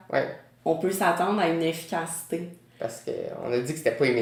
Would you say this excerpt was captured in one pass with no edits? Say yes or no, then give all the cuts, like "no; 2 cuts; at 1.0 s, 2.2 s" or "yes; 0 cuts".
yes; 0 cuts